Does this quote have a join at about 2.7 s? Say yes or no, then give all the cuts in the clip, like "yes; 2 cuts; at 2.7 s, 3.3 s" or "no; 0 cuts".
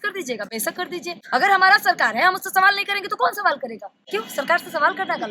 no; 2 cuts; at 1.2 s, 3.9 s